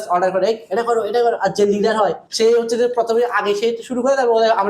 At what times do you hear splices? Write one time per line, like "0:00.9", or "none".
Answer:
0:02.2

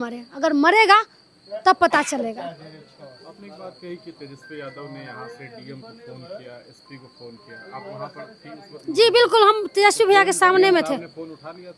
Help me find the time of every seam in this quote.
none

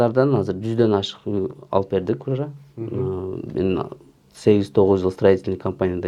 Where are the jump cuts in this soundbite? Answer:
none

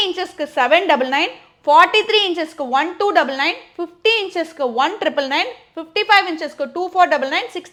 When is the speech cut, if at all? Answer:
none

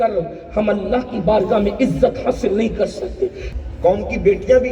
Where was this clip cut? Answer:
0:03.5

